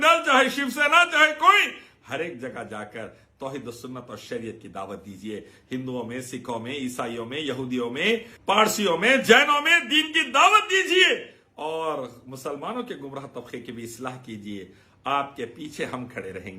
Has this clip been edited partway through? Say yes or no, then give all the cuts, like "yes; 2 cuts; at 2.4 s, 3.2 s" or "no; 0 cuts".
yes; 1 cut; at 8.3 s